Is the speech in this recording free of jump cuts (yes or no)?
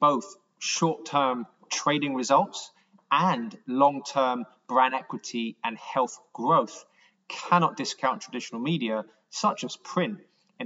yes